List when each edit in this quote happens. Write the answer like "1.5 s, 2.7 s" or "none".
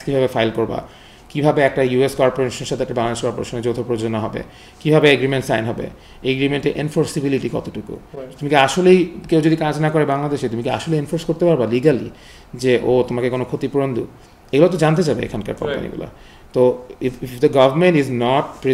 none